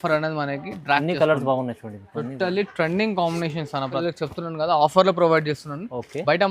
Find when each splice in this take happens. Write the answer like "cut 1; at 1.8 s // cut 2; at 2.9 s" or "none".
cut 1; at 3.9 s